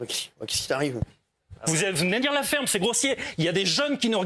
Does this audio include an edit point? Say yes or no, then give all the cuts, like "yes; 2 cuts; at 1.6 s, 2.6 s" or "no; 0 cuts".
yes; 1 cut; at 1.3 s